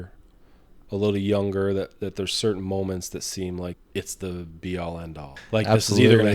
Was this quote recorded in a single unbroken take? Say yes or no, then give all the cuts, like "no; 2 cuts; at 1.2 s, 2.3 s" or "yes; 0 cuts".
no; 2 cuts; at 3.8 s, 5.3 s